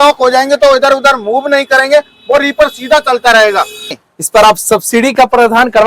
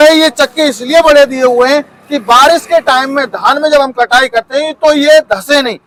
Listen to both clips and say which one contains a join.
first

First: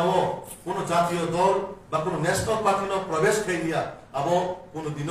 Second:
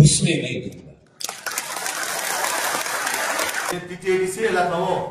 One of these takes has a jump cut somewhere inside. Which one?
second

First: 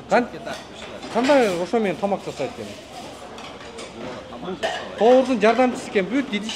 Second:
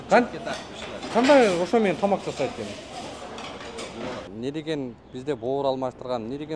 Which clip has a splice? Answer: second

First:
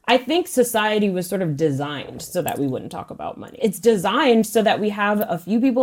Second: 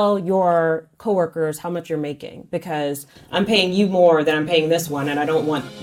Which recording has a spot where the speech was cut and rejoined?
first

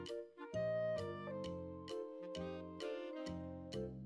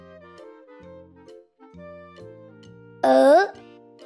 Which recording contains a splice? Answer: second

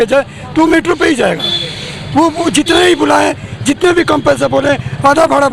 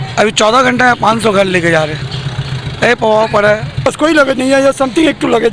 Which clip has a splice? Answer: second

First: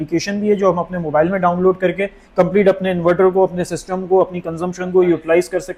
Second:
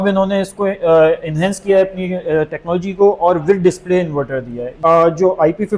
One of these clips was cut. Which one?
second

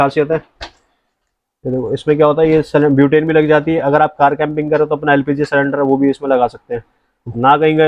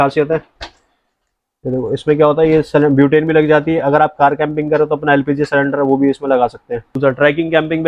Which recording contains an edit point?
second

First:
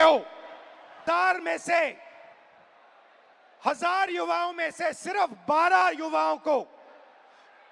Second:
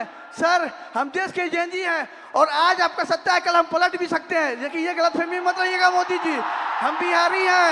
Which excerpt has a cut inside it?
first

